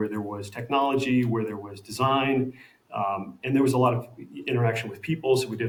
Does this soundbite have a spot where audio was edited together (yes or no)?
no